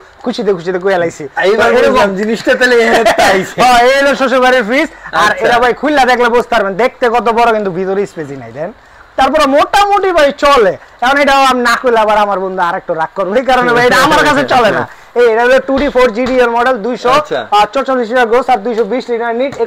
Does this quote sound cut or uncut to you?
uncut